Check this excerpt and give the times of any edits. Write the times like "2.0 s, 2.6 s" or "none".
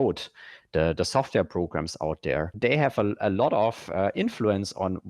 2.5 s